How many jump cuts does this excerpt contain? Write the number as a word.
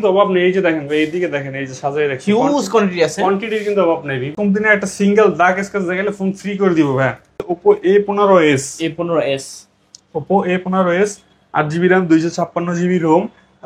two